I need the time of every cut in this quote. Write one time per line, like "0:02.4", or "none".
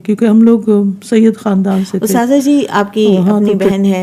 0:02.0